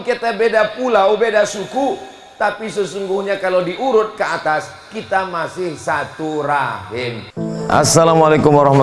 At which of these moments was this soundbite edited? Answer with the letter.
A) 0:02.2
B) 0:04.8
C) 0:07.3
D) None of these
C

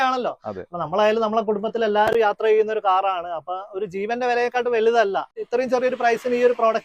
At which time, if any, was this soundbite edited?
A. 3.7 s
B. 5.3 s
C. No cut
B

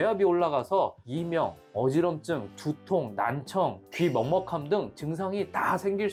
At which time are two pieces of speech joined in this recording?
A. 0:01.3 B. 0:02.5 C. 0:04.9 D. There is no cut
D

